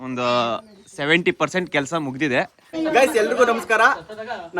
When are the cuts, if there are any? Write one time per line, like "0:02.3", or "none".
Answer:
0:02.6

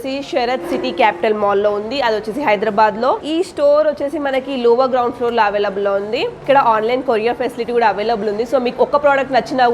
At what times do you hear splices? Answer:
0:03.2
0:06.4

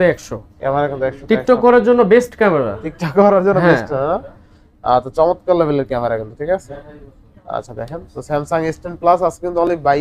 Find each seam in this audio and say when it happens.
none

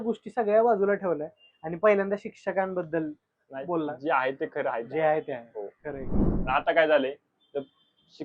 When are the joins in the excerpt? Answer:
0:06.2

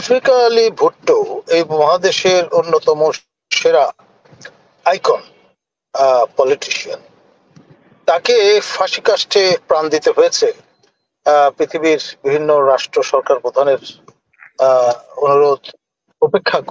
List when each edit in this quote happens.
none

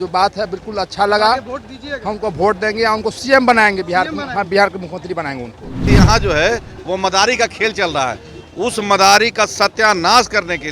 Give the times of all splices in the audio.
0:05.8

